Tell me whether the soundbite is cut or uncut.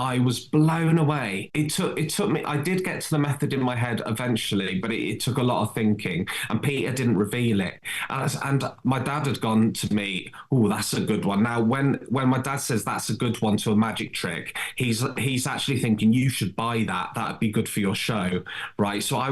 cut